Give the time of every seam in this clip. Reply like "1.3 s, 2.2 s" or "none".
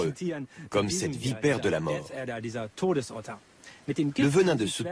none